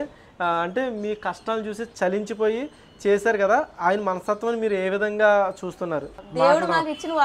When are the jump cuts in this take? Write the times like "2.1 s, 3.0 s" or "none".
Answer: 6.2 s